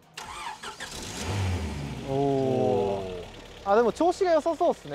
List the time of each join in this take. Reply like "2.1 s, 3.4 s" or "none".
none